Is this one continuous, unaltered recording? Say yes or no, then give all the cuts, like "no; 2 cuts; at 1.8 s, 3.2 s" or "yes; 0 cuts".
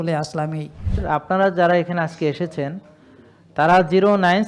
no; 1 cut; at 1.0 s